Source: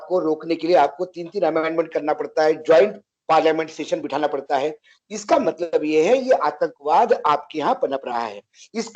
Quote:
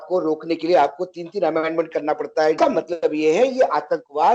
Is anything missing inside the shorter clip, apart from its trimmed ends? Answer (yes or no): yes